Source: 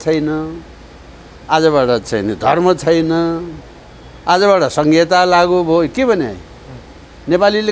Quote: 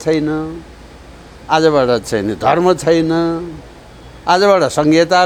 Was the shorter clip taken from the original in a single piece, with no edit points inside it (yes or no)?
yes